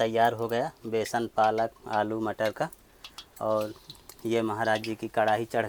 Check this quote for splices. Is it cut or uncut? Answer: uncut